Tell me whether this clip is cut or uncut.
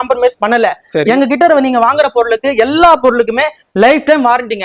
uncut